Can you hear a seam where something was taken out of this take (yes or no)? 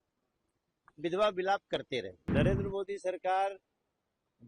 yes